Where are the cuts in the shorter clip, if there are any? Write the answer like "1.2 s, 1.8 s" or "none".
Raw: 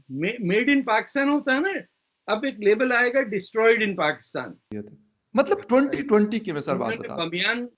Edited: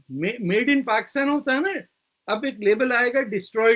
none